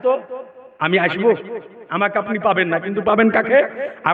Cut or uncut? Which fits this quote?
uncut